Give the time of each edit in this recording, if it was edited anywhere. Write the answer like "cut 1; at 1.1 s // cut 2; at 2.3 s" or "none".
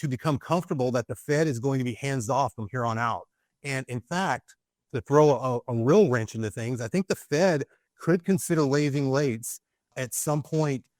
none